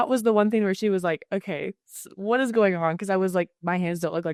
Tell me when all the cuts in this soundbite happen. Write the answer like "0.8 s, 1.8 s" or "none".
none